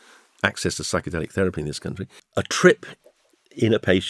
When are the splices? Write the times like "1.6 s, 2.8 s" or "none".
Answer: 2.2 s